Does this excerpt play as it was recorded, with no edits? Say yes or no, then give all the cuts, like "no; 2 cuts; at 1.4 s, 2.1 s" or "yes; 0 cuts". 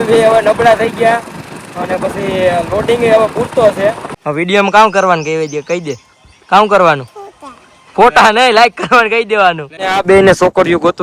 no; 2 cuts; at 4.1 s, 9.8 s